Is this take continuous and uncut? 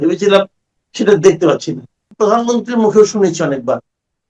no; 1 cut; at 2.0 s

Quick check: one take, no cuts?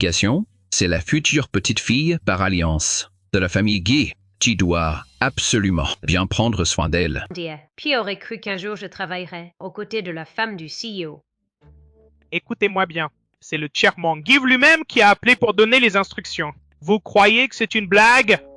no; 1 cut; at 7.3 s

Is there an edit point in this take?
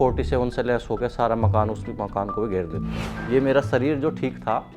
yes; 1 cut; at 3.1 s

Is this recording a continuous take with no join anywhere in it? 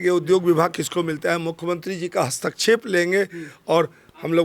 yes; 0 cuts

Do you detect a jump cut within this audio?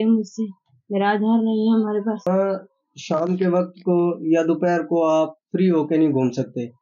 yes; 1 cut; at 2.3 s

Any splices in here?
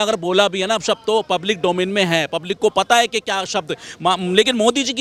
no; 0 cuts

